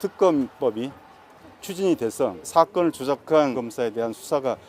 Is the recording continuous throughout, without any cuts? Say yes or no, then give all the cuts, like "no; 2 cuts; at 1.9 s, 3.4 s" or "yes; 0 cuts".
no; 2 cuts; at 2.5 s, 3.6 s